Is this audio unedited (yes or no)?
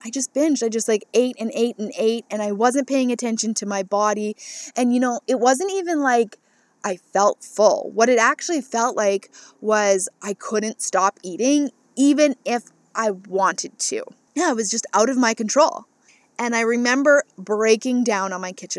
yes